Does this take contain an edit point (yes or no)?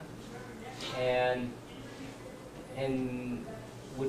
yes